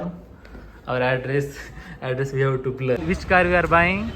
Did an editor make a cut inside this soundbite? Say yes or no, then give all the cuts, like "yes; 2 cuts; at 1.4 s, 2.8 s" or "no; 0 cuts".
yes; 1 cut; at 3.0 s